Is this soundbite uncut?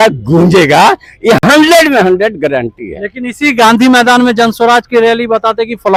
yes; 0 cuts

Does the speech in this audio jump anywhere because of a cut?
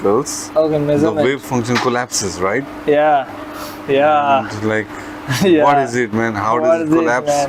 no; 0 cuts

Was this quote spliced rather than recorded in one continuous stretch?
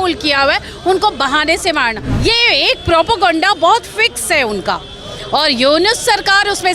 yes; 1 cut; at 2.1 s

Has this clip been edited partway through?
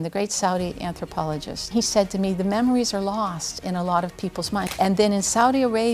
yes; 2 cuts; at 1.7 s, 4.7 s

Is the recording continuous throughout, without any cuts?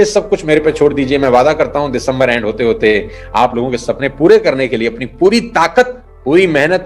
yes; 0 cuts

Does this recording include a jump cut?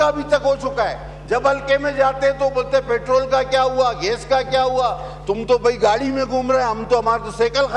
no; 0 cuts

